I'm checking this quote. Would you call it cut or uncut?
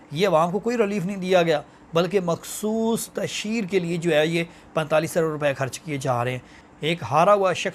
cut